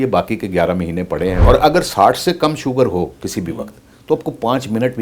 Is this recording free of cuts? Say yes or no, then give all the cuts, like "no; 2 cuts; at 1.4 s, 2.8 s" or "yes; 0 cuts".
no; 1 cut; at 1.4 s